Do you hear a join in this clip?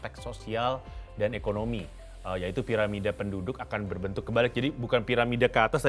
no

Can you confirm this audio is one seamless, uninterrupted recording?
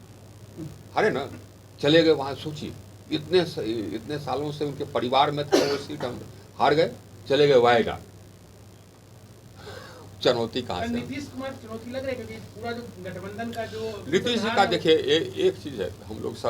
yes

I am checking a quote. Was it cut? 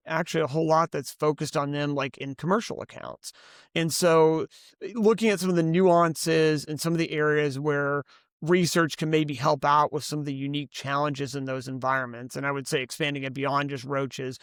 no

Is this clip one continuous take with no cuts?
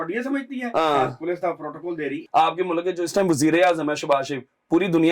no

